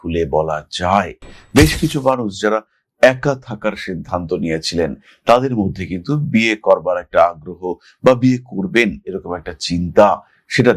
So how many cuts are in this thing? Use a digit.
0